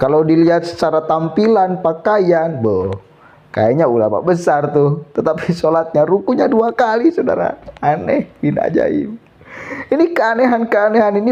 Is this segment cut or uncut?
uncut